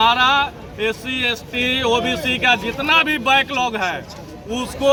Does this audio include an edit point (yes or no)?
no